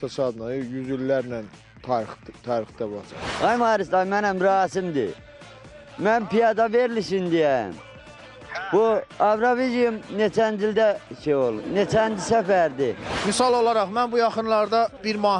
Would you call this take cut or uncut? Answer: cut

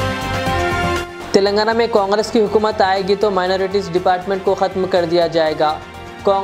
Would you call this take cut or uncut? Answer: uncut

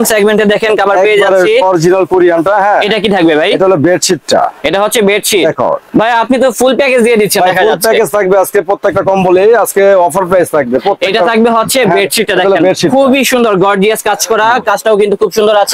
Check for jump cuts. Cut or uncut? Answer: uncut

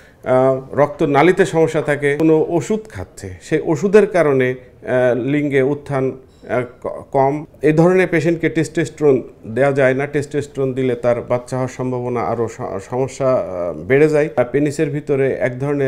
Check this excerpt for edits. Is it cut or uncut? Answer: cut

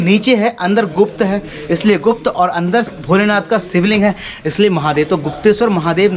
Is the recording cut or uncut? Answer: uncut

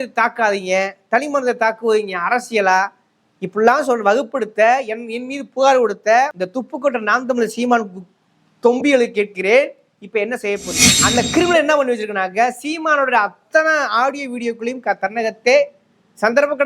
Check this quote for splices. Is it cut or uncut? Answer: cut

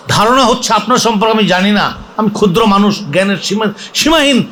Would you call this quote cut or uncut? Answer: uncut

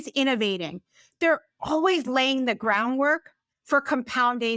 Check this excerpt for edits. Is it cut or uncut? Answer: uncut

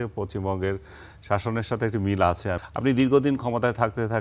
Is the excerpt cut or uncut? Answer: cut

